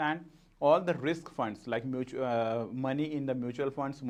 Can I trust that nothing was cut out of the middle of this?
yes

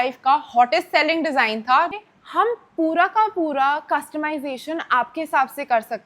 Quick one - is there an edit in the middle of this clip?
yes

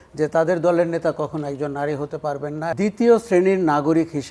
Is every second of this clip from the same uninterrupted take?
no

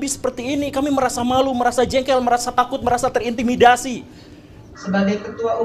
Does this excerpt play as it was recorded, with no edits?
no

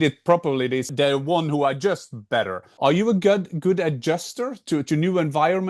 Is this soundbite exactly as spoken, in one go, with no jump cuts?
no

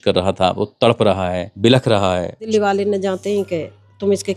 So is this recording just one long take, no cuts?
no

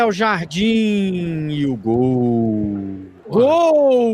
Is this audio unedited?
yes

